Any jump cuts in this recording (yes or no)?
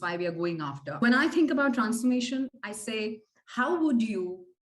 yes